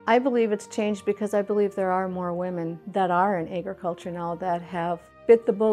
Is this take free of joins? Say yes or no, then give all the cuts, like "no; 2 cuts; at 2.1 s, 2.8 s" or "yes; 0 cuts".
yes; 0 cuts